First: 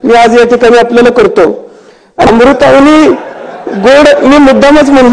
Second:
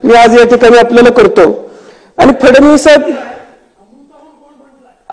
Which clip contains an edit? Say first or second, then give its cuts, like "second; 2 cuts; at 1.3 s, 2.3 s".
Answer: first; 1 cut; at 2.3 s